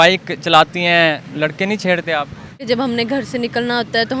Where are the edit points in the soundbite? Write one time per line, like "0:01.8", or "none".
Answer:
0:01.3
0:02.6